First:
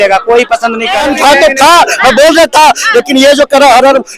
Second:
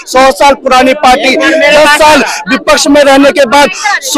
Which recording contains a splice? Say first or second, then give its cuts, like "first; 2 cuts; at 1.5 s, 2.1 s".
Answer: first; 1 cut; at 1.0 s